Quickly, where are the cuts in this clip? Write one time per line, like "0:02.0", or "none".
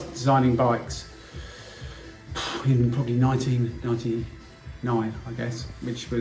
none